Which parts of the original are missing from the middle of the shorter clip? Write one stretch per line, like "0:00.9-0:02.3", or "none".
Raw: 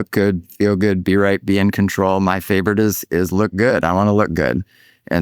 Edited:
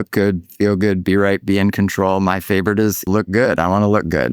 0:03.0-0:03.3